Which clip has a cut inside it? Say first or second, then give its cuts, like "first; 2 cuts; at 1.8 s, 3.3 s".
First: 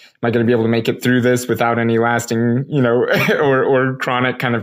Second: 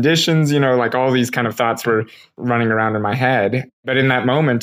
second; 2 cuts; at 2.3 s, 3.9 s